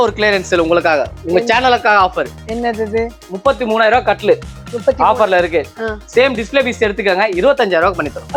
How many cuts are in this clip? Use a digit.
0